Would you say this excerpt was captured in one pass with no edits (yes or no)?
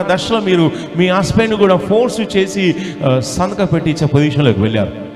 yes